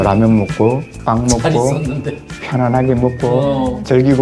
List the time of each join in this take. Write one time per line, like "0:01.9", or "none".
0:00.9